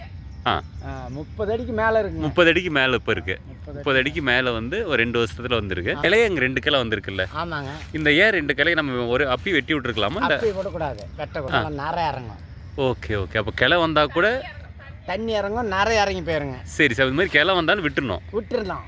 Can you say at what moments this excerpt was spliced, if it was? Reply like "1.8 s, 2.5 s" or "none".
6.0 s, 11.5 s